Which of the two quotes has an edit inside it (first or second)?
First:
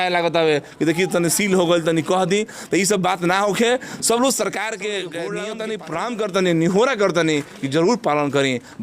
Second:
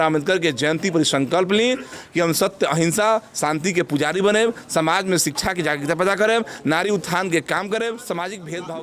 first